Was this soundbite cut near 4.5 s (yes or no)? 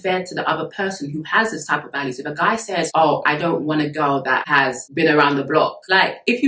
yes